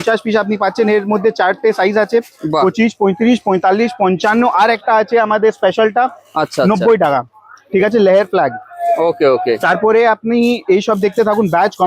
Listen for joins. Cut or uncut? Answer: uncut